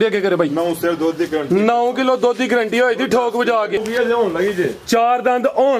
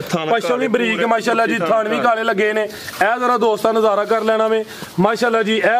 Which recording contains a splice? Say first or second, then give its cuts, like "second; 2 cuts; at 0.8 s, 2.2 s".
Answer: first; 1 cut; at 3.8 s